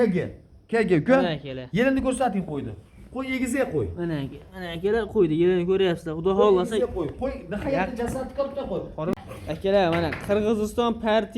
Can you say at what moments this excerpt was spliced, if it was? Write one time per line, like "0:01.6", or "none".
0:09.1

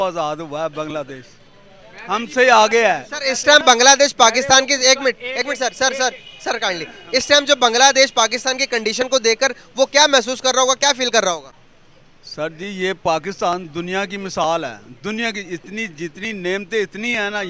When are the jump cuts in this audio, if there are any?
none

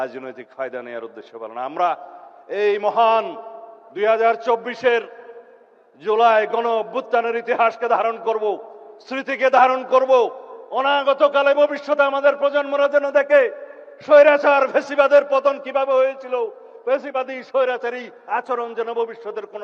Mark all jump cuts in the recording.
none

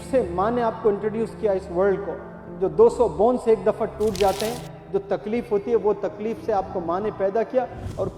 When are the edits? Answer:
none

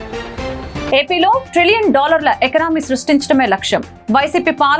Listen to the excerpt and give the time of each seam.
none

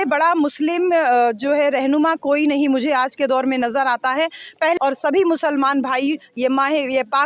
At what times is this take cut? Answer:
0:04.8

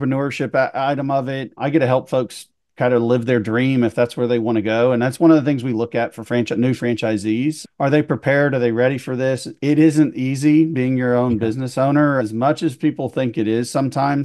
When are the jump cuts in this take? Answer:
0:01.6
0:07.6
0:12.2

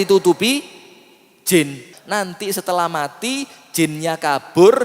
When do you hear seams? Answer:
0:01.9

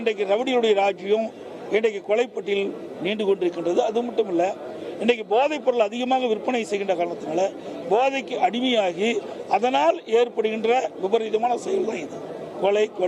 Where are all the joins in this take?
none

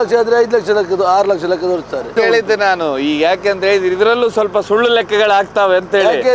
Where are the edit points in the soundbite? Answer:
0:02.1

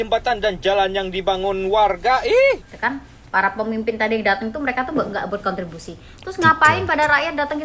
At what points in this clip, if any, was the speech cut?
0:02.7

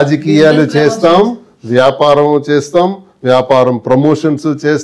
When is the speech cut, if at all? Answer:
none

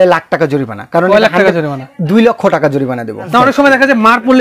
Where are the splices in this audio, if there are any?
0:03.3

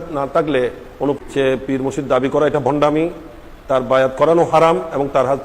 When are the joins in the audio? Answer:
0:01.2

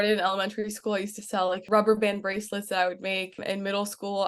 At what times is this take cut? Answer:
0:01.6
0:03.4

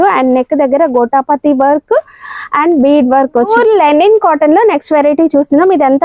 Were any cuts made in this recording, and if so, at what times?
0:03.5

